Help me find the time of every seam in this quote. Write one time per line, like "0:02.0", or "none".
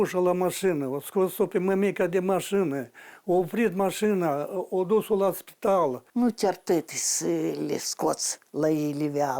0:06.0